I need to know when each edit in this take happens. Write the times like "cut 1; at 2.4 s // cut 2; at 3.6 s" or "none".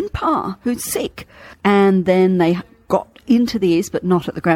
cut 1; at 1.5 s